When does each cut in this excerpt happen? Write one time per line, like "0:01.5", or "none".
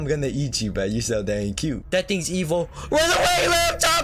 0:01.8